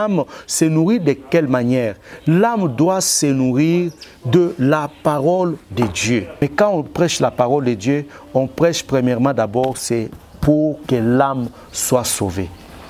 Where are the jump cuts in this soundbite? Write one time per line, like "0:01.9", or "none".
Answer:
0:06.4